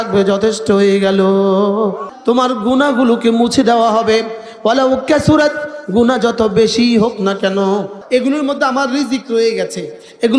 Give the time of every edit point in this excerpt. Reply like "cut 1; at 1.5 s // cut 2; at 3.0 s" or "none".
cut 1; at 2.1 s // cut 2; at 7.9 s